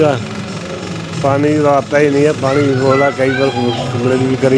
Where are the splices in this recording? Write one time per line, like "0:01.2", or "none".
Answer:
none